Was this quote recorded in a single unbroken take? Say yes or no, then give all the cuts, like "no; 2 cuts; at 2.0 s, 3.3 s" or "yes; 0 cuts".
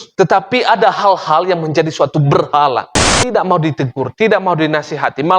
no; 1 cut; at 3.0 s